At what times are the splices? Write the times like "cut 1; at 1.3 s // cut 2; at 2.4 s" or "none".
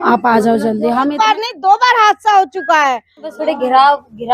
cut 1; at 1.1 s // cut 2; at 3.3 s